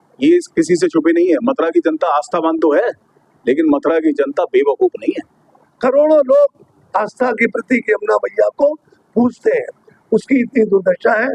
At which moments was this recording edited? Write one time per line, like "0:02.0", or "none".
0:05.6